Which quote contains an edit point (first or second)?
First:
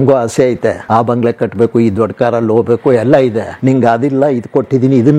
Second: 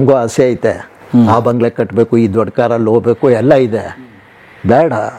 first